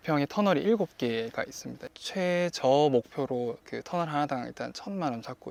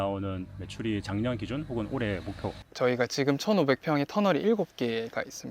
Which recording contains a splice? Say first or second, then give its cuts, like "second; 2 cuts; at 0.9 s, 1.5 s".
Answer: second; 1 cut; at 2.6 s